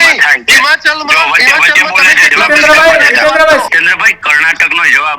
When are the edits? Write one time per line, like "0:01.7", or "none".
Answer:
0:03.7